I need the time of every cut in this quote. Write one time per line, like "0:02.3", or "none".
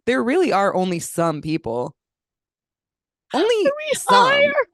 none